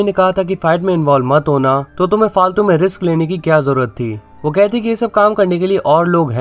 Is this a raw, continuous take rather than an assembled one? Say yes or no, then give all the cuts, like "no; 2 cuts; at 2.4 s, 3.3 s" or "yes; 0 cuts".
no; 1 cut; at 1.9 s